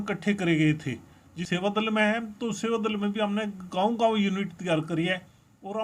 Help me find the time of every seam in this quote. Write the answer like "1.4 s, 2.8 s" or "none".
1.4 s